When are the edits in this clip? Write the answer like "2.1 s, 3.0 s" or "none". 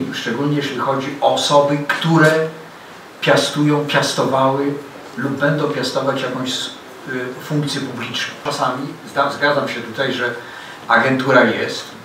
8.4 s